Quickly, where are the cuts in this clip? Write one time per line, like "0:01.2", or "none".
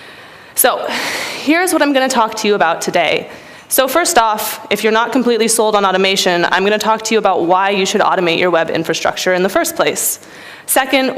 0:07.8